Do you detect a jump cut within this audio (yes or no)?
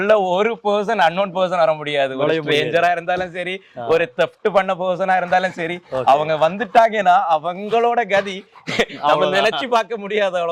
no